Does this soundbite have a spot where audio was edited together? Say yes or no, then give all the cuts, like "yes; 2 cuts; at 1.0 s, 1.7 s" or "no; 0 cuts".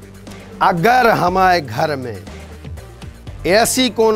no; 0 cuts